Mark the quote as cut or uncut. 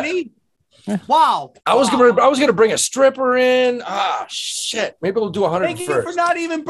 cut